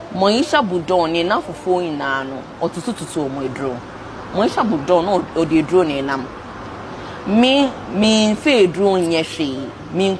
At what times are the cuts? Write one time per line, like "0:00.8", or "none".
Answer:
none